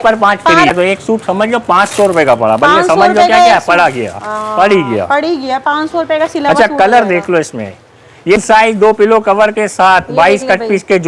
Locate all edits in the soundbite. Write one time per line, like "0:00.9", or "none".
0:00.7
0:08.4